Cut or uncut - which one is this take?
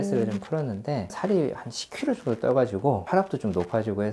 cut